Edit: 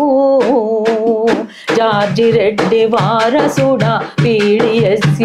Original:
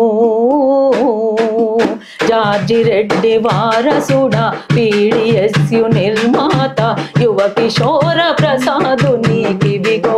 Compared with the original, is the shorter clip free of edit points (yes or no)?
yes